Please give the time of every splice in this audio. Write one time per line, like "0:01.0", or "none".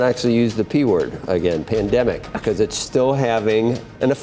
0:02.8